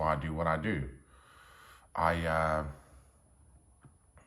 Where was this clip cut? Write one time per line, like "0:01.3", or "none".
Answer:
none